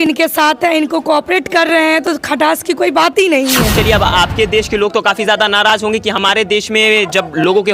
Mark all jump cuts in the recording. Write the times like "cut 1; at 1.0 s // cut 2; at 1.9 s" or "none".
cut 1; at 3.8 s